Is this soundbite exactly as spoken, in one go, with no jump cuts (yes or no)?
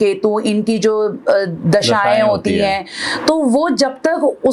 yes